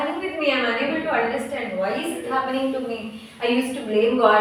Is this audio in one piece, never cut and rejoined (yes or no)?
yes